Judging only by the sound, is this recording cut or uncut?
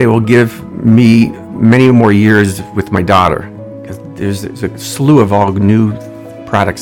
uncut